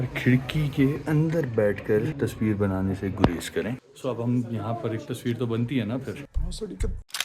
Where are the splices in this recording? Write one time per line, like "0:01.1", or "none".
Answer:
0:01.0
0:02.1
0:03.9